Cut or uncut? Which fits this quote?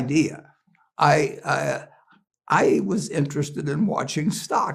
uncut